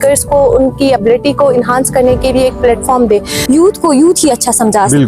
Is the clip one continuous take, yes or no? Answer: no